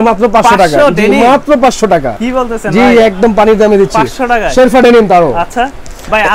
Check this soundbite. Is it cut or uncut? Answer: uncut